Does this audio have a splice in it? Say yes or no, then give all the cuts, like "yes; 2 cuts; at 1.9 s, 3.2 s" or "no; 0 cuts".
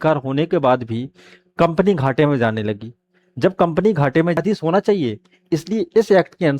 yes; 1 cut; at 4.4 s